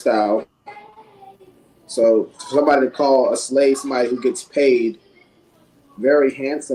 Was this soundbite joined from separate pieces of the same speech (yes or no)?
no